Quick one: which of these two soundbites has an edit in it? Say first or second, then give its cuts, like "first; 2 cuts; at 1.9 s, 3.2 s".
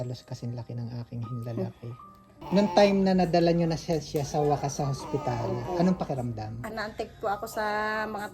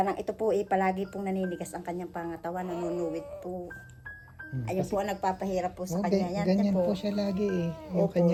first; 2 cuts; at 2.4 s, 6.7 s